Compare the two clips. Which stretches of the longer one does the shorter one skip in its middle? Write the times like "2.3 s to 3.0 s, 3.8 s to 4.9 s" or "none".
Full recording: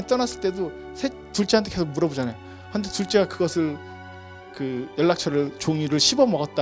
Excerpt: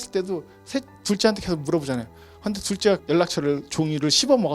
3.3 s to 4.9 s